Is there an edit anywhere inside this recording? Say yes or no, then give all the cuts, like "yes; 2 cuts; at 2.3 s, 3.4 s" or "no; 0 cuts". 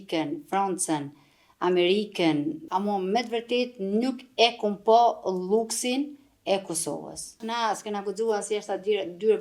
yes; 2 cuts; at 2.6 s, 7.4 s